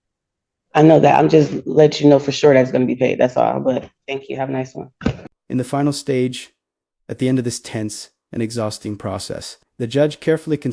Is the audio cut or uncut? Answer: uncut